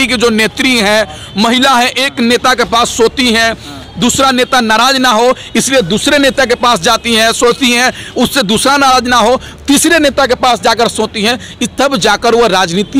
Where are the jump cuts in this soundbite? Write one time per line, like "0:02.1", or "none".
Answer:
none